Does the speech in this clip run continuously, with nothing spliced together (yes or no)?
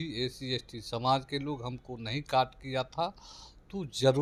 yes